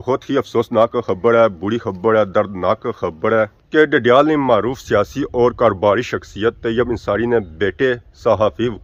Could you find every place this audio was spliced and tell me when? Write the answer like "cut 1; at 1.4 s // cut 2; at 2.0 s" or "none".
none